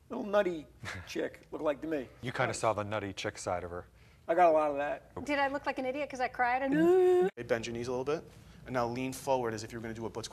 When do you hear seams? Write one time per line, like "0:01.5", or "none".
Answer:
0:02.2
0:05.2
0:07.3